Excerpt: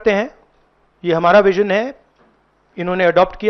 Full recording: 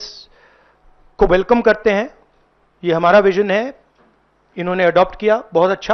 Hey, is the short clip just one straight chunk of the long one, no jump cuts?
yes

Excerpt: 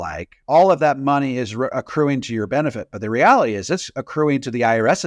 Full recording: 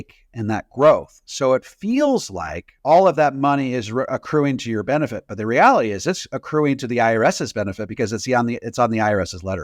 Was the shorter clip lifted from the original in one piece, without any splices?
yes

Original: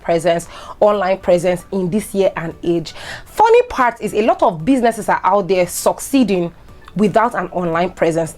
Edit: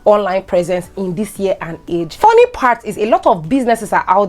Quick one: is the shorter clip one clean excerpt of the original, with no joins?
no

